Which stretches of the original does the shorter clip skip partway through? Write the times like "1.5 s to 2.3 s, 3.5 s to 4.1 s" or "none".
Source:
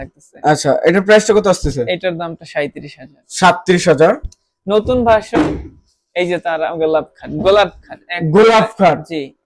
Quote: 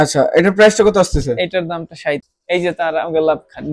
2.8 s to 6.0 s